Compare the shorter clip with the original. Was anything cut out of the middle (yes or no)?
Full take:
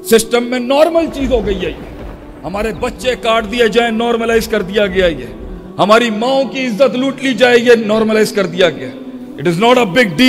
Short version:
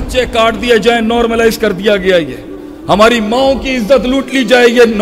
no